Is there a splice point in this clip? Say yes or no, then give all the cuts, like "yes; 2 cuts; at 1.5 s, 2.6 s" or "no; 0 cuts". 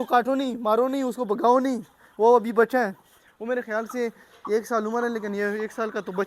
no; 0 cuts